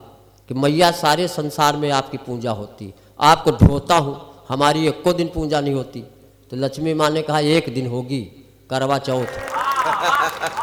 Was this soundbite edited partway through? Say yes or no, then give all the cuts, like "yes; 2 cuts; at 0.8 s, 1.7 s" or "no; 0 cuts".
no; 0 cuts